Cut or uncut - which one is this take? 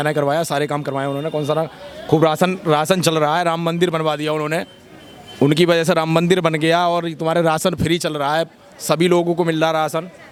uncut